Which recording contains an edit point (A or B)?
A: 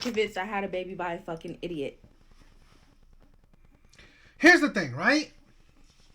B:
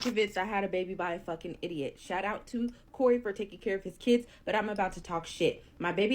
B